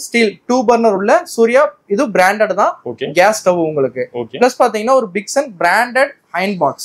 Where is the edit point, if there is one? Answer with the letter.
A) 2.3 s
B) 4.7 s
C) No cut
C